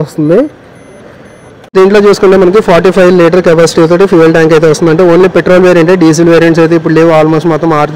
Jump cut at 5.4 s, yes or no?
no